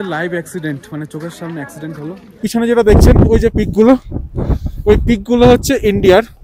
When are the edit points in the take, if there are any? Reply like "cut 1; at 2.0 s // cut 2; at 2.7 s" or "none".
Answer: cut 1; at 2.4 s